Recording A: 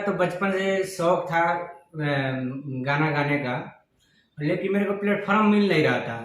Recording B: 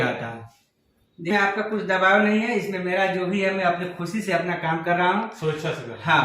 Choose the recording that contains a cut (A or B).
B